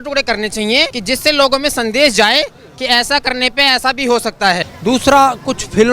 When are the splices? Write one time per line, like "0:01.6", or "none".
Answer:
0:01.0
0:04.7